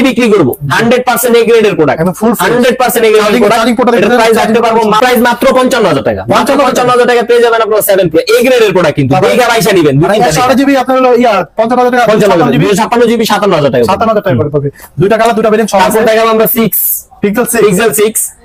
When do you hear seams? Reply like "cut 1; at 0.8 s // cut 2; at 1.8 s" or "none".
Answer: none